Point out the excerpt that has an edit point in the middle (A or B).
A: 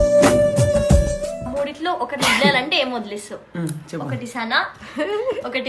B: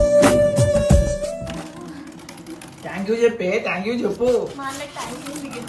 A